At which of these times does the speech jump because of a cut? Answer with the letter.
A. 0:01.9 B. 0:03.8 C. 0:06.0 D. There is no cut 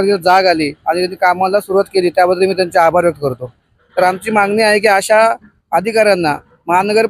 B